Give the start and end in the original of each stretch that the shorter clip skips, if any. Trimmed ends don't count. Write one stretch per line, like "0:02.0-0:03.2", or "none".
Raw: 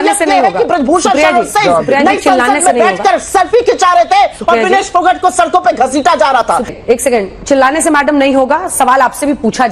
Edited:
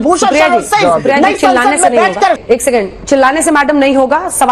0:03.2-0:06.8